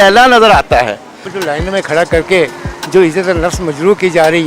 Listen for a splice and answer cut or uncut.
cut